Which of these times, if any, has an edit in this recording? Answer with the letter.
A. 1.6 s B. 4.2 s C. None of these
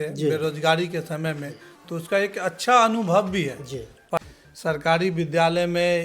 B